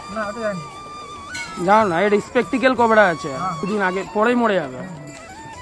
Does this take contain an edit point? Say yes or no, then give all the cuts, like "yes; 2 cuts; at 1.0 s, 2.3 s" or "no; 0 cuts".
yes; 1 cut; at 3.6 s